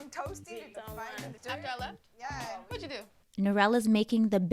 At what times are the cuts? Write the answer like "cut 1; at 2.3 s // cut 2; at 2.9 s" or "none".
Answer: cut 1; at 3.2 s